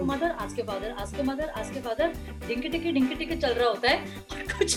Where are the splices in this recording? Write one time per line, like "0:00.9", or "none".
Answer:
none